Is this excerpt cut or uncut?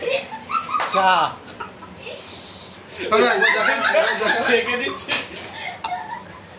cut